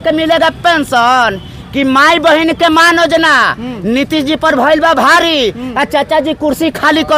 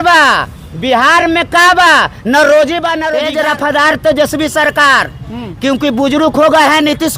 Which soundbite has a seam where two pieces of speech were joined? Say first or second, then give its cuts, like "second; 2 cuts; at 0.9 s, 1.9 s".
second; 1 cut; at 3.1 s